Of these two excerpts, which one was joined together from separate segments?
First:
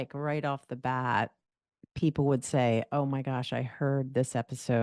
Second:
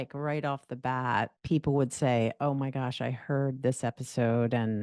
second; 1 cut; at 1.4 s

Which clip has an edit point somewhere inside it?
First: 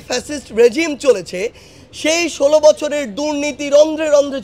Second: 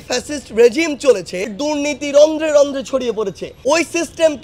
second; 2 cuts; at 1.5 s, 3.4 s

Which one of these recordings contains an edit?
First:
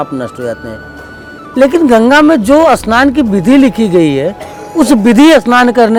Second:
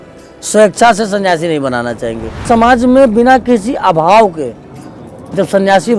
second; 1 cut; at 2.4 s

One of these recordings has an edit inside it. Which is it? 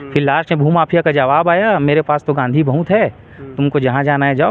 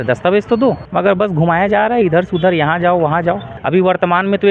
second; 2 cuts; at 0.8 s, 3.5 s

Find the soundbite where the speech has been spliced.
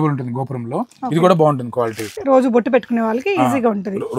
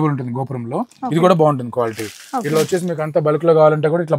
first; 1 cut; at 2.2 s

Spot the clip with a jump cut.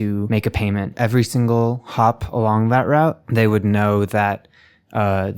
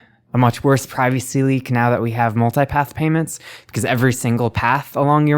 first; 2 cuts; at 0.8 s, 3.2 s

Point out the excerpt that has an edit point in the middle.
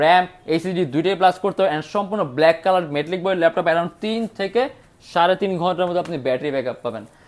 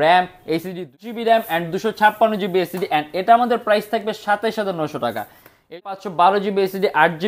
second; 2 cuts; at 0.9 s, 5.7 s

